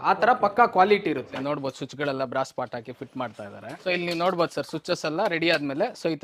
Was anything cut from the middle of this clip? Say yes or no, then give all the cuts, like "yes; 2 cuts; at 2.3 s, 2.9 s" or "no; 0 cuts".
yes; 2 cuts; at 1.3 s, 3.7 s